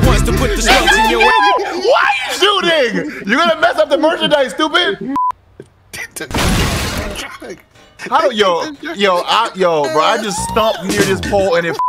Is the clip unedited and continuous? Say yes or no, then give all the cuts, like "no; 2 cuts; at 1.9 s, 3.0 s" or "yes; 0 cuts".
no; 1 cut; at 5.2 s